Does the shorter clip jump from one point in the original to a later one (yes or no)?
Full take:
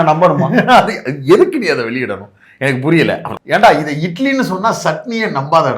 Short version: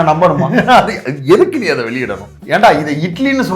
yes